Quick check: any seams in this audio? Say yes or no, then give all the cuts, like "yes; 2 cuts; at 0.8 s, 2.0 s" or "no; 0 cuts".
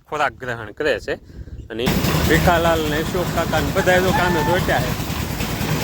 yes; 1 cut; at 1.9 s